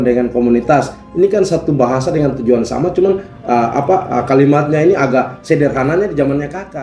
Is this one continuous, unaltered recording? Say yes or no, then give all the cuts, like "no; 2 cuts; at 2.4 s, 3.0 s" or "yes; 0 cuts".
yes; 0 cuts